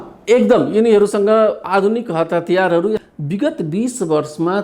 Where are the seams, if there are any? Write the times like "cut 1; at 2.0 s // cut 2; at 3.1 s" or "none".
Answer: cut 1; at 3.1 s